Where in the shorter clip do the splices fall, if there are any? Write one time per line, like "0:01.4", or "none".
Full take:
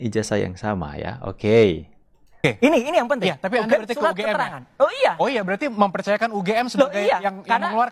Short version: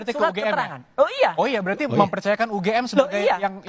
none